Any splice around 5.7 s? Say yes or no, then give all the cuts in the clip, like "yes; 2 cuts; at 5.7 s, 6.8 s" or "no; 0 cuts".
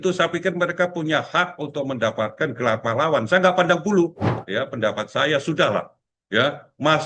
no; 1 cut; at 4.3 s